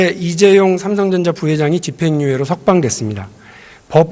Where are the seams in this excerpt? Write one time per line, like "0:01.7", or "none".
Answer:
none